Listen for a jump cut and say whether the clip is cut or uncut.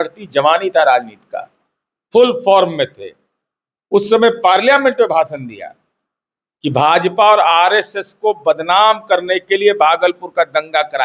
uncut